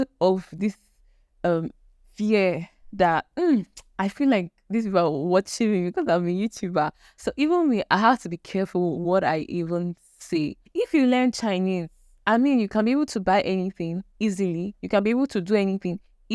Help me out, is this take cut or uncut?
cut